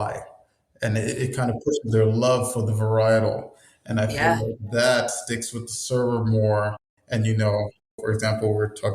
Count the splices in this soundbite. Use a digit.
1